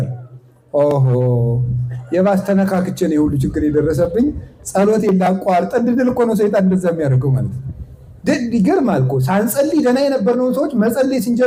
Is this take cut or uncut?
uncut